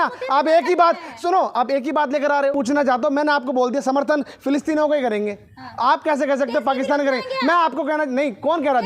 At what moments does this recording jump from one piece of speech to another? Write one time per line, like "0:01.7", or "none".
0:02.5